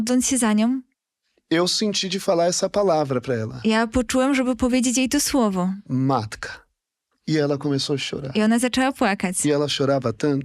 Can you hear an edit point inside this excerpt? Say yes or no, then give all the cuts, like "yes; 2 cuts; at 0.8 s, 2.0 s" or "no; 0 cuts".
no; 0 cuts